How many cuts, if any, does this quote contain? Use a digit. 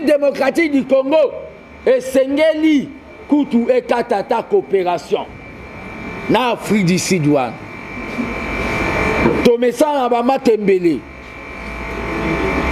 0